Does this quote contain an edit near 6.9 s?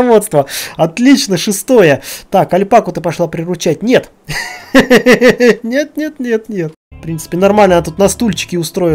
yes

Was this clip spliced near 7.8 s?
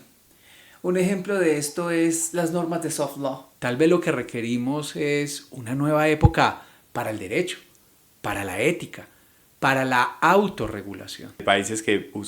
no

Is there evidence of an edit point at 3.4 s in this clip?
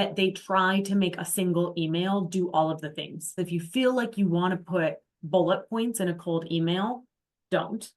yes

